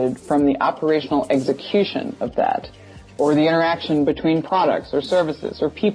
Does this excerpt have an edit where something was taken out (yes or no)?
no